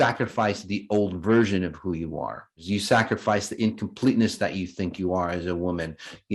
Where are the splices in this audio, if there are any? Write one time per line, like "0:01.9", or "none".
0:02.5